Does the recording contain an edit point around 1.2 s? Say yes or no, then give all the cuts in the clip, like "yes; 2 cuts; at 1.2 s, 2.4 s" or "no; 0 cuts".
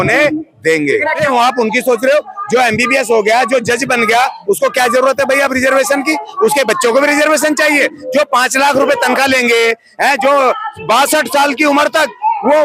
yes; 1 cut; at 1.2 s